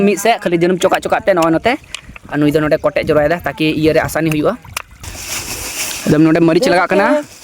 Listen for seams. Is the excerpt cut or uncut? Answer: cut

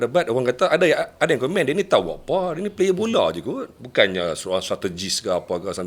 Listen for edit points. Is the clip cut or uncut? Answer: uncut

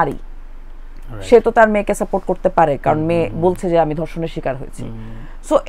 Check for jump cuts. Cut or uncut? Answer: uncut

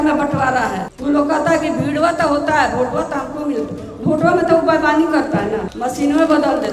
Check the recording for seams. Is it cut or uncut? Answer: cut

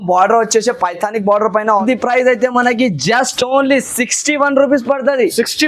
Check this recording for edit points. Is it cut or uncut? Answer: cut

